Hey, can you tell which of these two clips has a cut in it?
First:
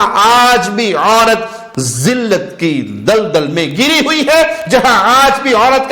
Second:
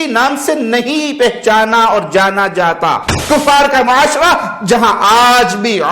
second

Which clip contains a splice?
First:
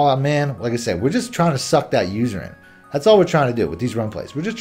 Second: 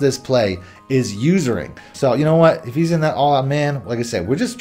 second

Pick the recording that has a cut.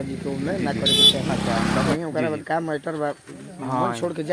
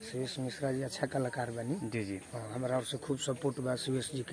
first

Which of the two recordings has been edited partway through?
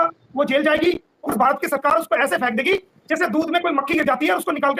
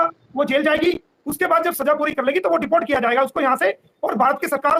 first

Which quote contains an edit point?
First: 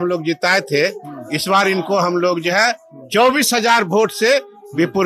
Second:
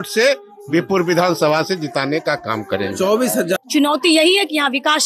second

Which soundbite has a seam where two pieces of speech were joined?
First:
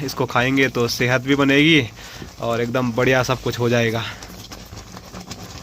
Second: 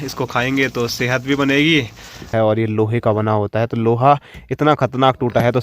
second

